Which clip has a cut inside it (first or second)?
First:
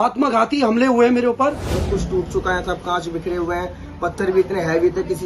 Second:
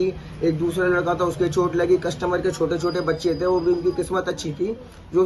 first